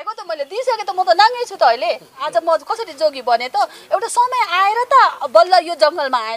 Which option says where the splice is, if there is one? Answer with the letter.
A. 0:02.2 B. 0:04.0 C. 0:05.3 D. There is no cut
A